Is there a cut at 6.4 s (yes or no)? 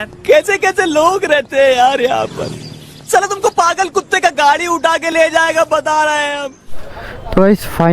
yes